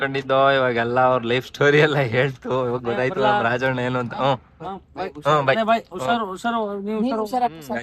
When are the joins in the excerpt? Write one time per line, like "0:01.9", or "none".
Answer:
0:02.6